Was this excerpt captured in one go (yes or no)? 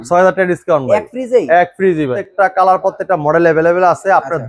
no